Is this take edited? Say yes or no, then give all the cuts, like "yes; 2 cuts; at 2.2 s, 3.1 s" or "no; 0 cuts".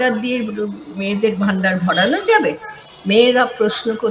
no; 0 cuts